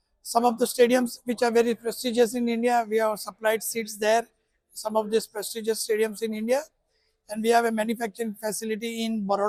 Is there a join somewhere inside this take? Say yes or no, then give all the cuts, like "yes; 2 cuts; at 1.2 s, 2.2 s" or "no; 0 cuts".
no; 0 cuts